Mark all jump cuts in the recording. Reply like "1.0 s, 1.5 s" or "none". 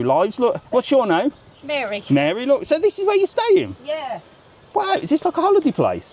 none